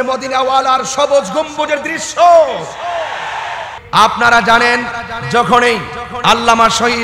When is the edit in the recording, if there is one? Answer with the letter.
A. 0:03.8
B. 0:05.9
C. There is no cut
A